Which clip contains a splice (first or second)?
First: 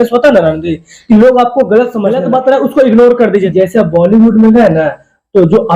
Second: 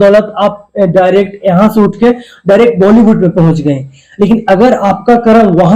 first